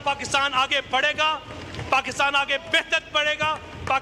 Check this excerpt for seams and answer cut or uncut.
uncut